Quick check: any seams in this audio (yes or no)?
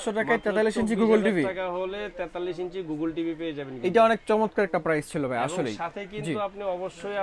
no